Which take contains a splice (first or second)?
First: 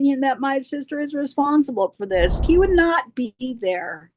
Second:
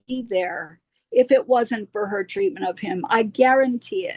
first